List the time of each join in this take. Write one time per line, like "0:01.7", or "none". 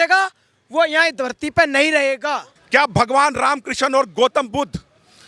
0:02.5

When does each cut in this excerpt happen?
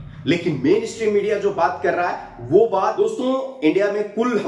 0:03.0

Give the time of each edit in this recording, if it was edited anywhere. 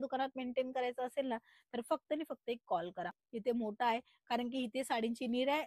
0:03.3

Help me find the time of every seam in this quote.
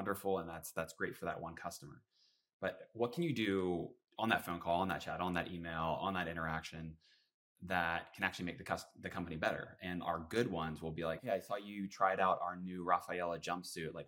0:11.2

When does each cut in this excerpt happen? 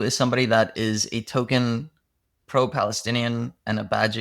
none

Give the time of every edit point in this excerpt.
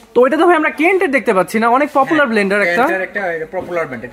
none

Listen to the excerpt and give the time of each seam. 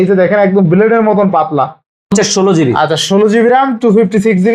0:02.1

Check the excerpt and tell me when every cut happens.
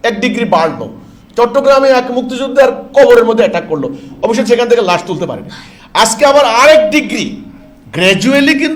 none

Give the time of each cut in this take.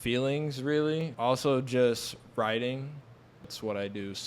0:01.1
0:03.5

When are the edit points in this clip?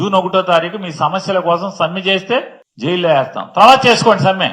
0:02.6

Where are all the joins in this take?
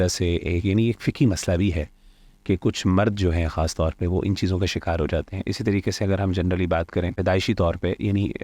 0:07.2

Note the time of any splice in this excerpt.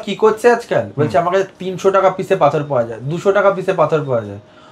none

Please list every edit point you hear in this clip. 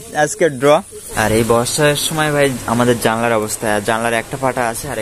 0:01.1

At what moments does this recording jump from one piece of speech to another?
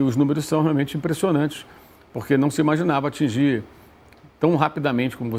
none

